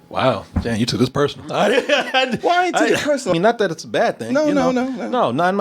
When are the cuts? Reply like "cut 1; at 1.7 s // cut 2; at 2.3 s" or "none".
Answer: cut 1; at 3.3 s